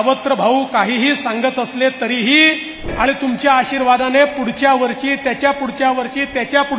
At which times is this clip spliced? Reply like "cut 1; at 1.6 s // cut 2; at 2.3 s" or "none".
cut 1; at 2.9 s